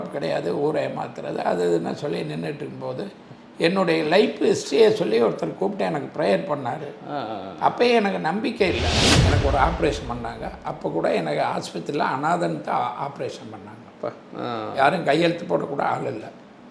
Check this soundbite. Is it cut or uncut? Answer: cut